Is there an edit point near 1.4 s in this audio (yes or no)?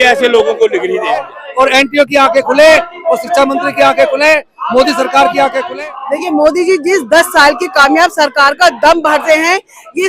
yes